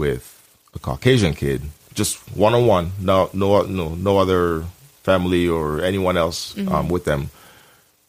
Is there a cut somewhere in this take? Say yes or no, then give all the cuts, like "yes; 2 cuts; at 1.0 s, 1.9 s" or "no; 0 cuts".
no; 0 cuts